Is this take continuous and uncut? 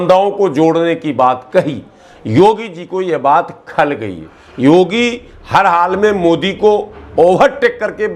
yes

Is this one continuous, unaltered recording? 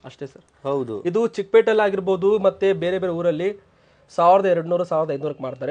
yes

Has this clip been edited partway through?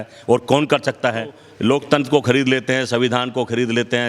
yes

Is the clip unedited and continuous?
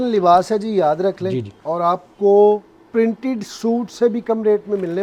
yes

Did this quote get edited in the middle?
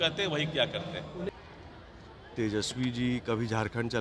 yes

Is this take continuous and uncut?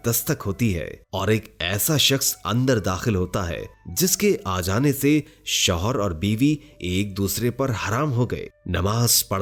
yes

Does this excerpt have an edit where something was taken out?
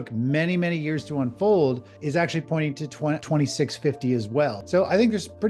yes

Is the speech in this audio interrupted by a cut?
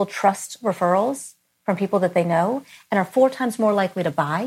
no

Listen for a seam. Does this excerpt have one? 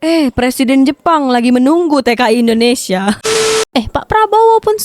no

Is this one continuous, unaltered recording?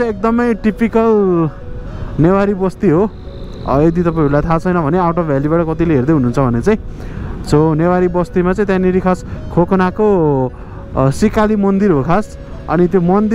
yes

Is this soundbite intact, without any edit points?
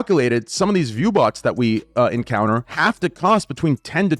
no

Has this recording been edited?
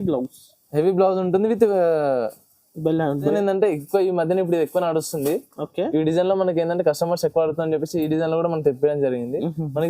yes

